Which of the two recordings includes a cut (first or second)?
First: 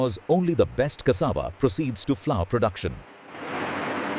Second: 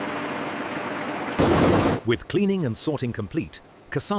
second